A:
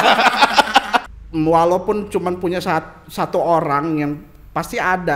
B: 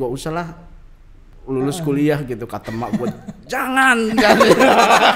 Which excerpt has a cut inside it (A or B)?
A